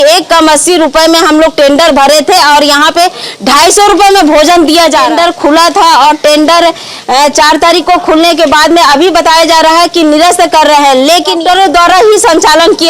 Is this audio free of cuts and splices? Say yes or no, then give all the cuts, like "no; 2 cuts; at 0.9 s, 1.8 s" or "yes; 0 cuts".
no; 2 cuts; at 5.1 s, 11.4 s